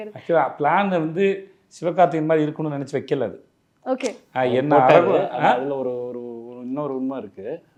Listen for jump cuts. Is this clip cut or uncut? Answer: uncut